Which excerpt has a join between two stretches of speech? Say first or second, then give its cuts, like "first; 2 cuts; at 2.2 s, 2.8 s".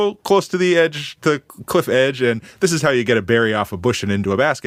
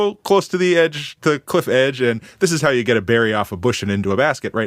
second; 1 cut; at 1.4 s